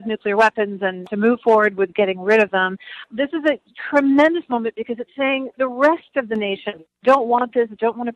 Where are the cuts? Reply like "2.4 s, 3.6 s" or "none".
1.0 s, 3.0 s